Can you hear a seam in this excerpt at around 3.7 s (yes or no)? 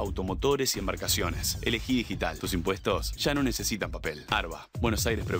no